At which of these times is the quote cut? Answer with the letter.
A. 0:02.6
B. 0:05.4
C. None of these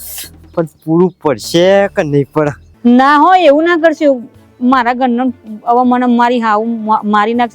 A